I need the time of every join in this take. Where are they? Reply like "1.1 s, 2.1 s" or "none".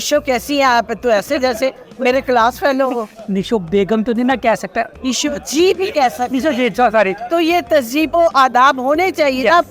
3.1 s, 4.9 s, 7.2 s